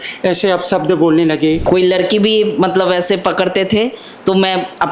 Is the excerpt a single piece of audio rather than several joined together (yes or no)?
no